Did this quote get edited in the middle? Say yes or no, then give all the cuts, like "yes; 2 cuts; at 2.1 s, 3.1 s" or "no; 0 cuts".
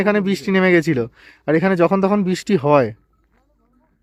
no; 0 cuts